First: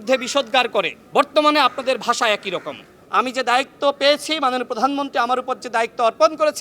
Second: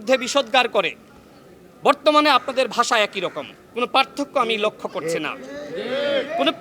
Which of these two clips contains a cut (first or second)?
first